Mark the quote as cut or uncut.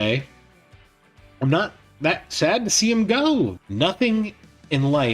cut